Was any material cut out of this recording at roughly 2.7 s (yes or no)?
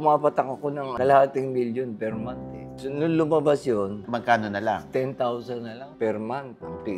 yes